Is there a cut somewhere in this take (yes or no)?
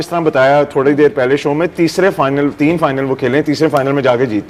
no